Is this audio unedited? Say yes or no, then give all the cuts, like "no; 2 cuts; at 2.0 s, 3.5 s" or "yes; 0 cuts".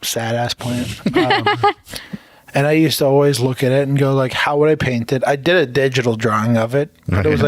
yes; 0 cuts